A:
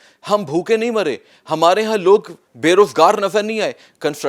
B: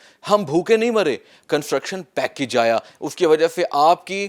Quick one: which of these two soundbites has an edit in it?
B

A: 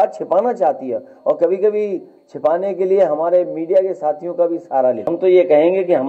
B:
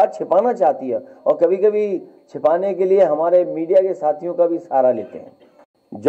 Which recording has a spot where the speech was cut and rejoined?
A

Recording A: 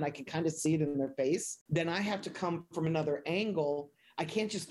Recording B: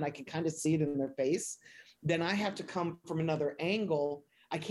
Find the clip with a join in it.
A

